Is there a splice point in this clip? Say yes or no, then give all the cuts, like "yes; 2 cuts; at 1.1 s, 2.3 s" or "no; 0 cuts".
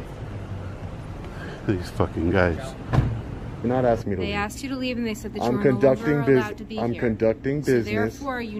yes; 1 cut; at 3.6 s